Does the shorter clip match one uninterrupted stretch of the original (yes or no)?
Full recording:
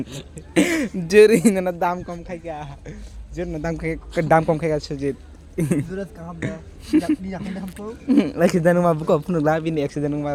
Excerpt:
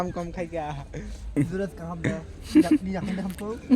no